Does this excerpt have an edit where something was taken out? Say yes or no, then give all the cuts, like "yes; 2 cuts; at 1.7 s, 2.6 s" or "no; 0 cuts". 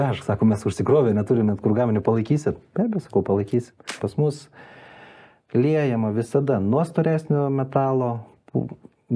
yes; 1 cut; at 4.0 s